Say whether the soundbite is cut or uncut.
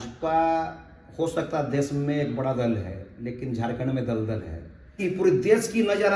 cut